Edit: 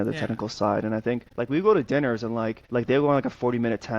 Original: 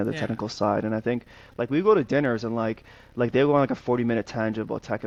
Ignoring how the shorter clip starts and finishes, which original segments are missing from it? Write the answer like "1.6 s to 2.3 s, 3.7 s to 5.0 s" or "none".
1.3 s to 1.5 s, 2.8 s to 3.0 s